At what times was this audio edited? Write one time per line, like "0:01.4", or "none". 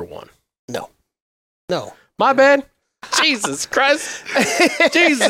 0:01.7
0:03.0